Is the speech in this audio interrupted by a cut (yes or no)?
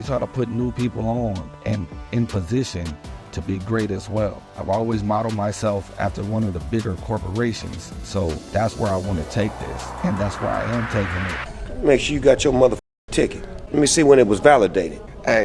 yes